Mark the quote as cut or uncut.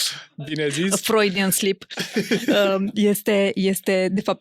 uncut